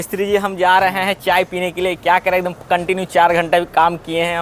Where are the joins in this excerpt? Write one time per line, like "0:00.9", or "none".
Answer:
none